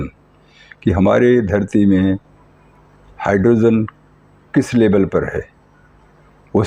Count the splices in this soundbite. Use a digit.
0